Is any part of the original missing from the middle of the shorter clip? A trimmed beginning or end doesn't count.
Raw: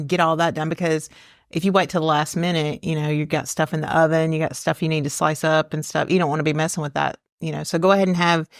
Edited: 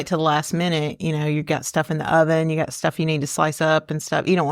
no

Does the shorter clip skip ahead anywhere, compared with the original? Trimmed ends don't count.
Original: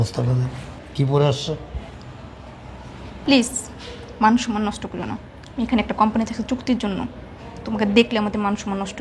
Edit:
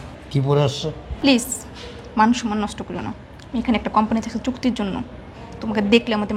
yes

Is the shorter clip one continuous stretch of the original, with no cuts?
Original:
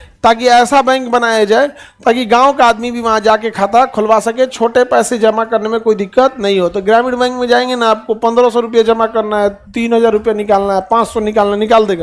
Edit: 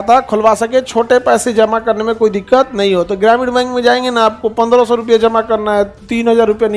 yes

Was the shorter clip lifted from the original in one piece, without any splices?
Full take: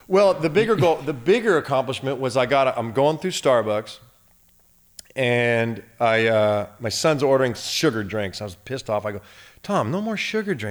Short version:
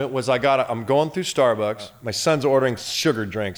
no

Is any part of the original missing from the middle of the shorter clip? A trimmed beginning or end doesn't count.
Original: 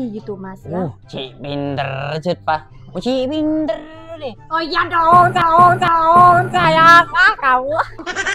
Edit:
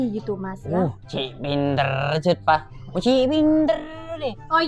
no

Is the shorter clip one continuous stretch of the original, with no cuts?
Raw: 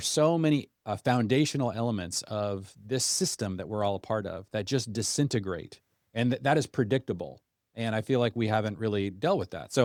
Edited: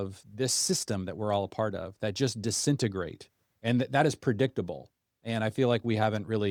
yes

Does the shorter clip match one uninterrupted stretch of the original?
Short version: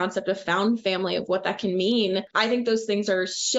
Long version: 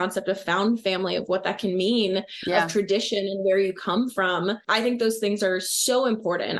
no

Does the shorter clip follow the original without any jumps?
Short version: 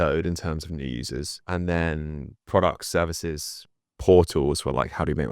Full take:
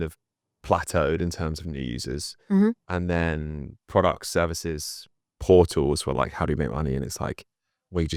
no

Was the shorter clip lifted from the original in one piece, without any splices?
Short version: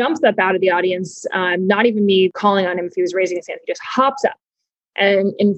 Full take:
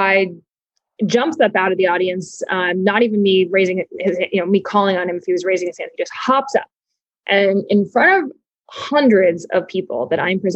no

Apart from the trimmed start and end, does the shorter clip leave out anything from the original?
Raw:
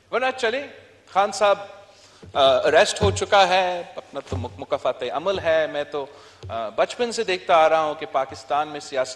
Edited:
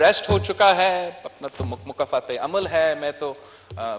no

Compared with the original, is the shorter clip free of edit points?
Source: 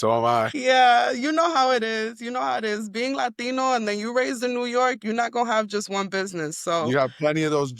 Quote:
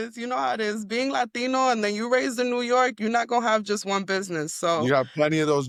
yes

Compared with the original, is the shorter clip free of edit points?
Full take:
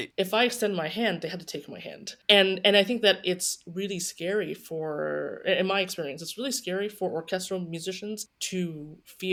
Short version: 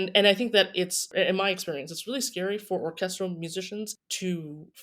no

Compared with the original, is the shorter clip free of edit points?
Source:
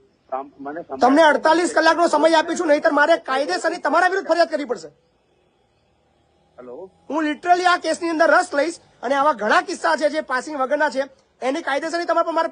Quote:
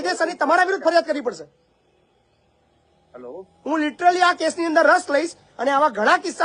yes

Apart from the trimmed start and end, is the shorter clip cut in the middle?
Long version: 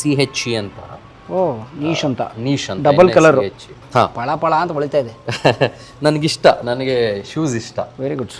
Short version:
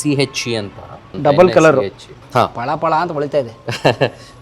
yes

